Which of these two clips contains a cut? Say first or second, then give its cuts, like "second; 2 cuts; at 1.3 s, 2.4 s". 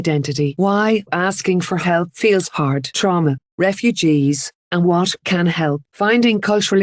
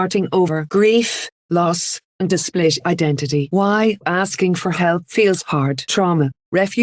first; 1 cut; at 4.9 s